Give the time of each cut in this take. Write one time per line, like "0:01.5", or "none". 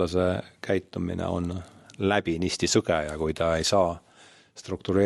none